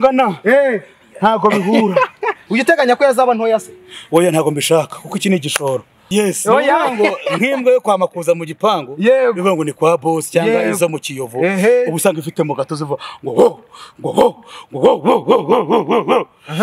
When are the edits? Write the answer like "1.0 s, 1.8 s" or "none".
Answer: 2.4 s, 6.0 s